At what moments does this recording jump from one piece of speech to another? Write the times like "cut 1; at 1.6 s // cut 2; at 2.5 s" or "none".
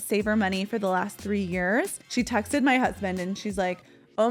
cut 1; at 2.0 s